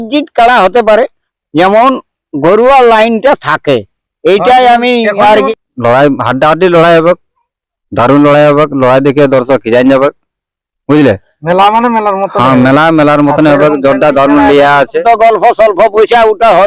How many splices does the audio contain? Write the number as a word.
two